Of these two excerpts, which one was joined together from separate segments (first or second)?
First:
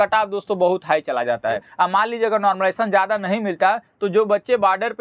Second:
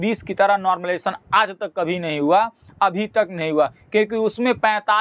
first